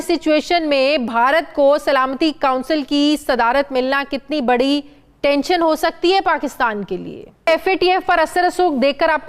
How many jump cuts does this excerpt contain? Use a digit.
1